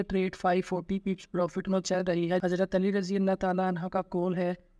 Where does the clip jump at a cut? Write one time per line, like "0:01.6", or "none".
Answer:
0:02.4